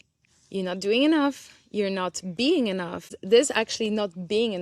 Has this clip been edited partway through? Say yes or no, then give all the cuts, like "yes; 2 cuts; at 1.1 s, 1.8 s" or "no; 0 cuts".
yes; 1 cut; at 3.2 s